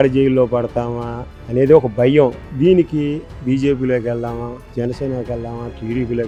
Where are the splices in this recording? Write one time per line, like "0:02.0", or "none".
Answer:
none